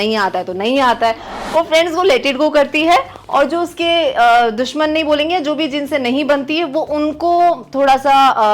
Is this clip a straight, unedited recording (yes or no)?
no